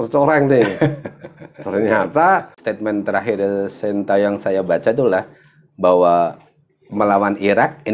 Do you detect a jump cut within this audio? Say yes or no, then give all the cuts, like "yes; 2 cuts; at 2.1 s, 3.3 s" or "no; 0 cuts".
yes; 1 cut; at 2.6 s